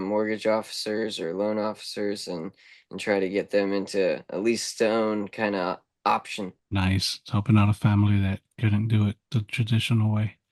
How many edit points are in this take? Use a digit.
0